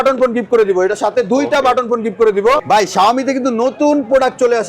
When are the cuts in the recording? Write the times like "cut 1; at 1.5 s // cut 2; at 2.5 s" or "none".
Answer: cut 1; at 2.6 s